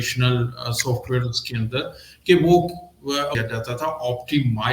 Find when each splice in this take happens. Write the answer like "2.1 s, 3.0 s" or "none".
3.4 s